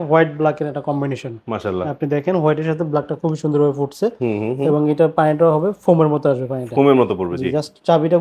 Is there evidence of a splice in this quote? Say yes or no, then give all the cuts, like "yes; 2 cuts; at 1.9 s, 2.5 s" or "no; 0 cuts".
no; 0 cuts